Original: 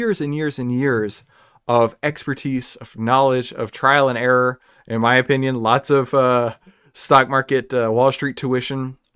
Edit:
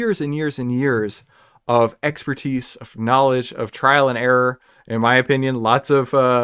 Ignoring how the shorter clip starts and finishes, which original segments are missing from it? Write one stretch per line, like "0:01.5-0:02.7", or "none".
none